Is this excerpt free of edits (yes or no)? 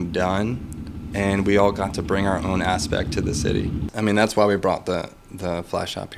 no